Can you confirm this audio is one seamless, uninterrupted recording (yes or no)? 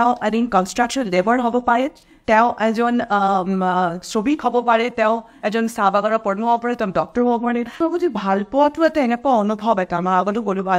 no